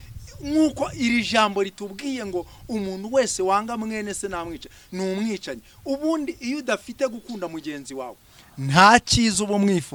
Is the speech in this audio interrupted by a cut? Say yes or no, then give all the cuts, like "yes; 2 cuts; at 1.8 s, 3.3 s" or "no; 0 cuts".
no; 0 cuts